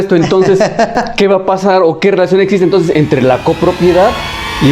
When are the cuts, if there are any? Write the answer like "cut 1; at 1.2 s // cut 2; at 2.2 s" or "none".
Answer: none